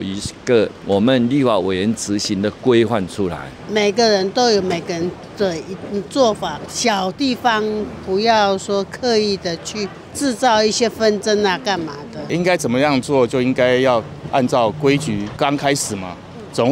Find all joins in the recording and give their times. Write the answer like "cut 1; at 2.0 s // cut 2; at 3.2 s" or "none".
none